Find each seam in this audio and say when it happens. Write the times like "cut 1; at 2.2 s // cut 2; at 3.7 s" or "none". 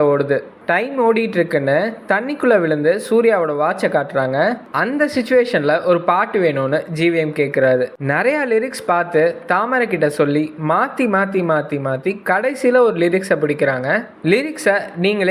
none